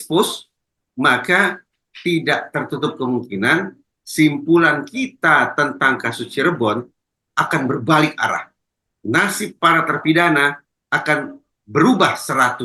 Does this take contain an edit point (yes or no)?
no